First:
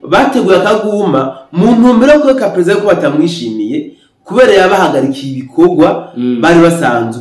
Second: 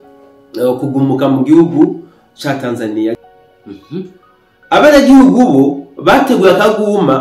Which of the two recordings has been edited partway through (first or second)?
second